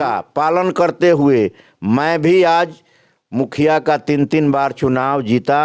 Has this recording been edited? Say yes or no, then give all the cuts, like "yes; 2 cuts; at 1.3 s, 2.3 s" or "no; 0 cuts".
no; 0 cuts